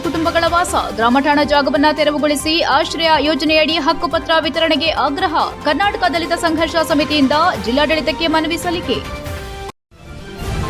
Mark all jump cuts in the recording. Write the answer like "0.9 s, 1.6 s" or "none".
9.7 s